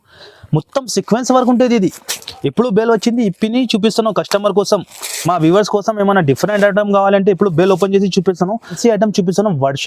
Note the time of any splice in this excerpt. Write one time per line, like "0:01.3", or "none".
0:08.7